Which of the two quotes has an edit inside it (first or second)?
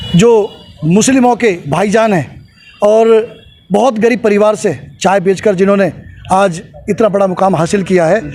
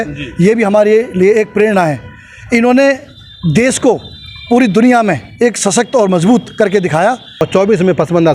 second